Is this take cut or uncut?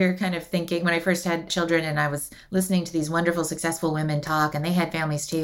cut